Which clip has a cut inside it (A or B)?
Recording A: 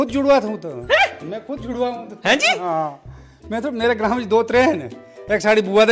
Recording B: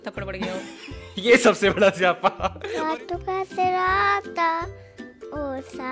B